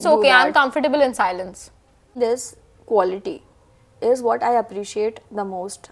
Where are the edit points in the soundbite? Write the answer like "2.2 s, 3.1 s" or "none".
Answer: 2.0 s